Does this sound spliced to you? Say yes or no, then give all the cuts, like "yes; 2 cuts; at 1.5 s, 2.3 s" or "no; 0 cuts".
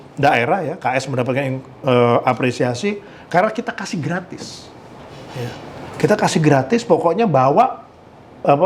no; 0 cuts